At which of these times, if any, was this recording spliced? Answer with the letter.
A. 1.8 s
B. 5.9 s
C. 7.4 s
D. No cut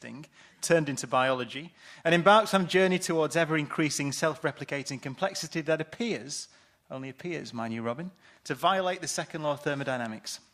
D